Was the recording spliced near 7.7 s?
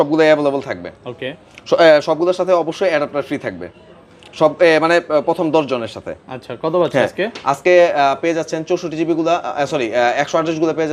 no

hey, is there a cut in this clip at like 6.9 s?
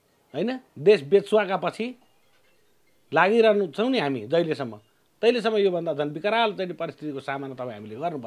no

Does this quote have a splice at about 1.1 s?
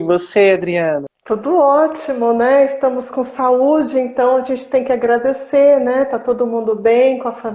yes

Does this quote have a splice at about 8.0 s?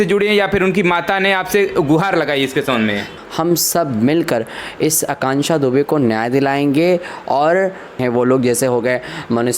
yes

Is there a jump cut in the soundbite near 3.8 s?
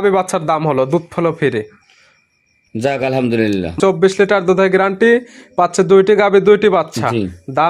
yes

